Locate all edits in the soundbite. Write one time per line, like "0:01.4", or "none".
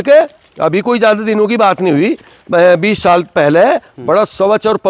none